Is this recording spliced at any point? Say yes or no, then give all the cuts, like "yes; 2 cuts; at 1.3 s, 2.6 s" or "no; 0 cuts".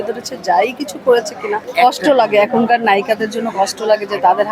yes; 1 cut; at 1.7 s